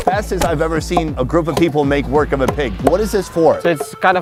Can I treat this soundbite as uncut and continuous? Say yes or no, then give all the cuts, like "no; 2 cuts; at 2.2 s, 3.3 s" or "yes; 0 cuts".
yes; 0 cuts